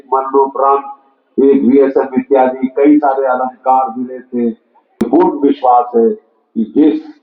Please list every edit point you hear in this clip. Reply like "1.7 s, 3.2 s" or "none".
5.0 s